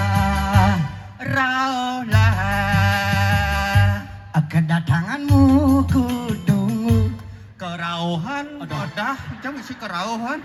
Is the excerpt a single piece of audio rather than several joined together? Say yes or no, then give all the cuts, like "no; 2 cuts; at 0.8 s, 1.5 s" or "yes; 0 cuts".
yes; 0 cuts